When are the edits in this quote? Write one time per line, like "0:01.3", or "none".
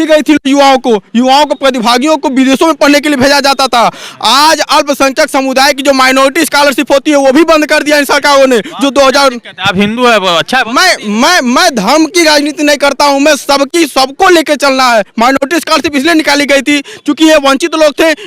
none

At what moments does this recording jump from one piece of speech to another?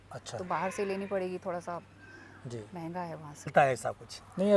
0:03.5

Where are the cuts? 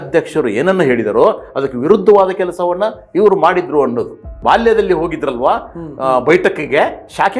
0:04.3

